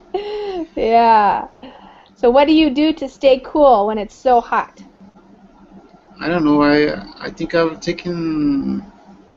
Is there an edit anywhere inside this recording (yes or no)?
no